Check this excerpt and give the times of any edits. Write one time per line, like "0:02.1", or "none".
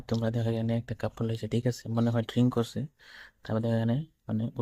none